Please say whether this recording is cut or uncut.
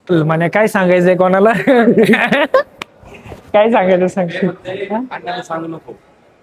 uncut